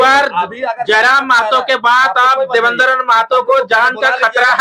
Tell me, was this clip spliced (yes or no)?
no